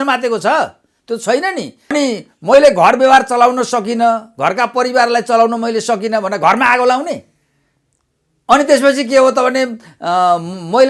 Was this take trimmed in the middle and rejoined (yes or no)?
yes